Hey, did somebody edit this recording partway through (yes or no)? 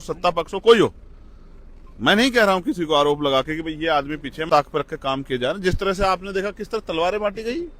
yes